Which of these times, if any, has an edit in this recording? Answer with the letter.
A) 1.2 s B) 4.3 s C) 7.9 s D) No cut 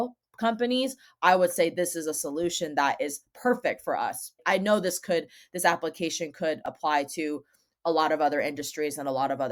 D